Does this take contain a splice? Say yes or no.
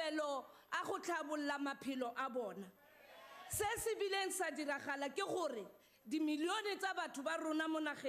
no